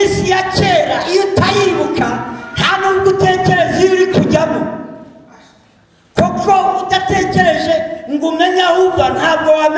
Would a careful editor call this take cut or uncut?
uncut